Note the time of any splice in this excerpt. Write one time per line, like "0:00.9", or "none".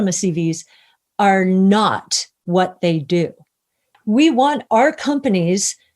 0:03.8